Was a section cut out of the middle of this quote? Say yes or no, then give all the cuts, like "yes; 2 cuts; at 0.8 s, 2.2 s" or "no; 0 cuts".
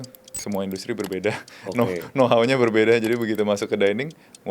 no; 0 cuts